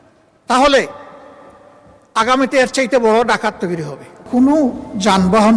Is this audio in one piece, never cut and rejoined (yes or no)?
no